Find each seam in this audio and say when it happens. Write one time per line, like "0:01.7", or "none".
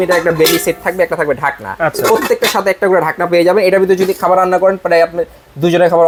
none